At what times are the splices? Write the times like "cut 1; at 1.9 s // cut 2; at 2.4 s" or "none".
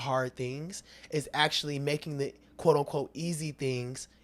none